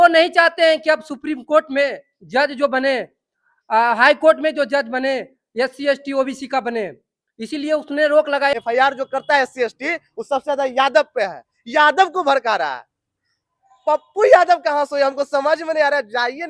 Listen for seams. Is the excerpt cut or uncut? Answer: cut